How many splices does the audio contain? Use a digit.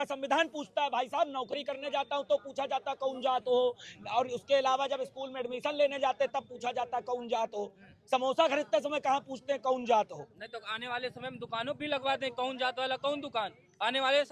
0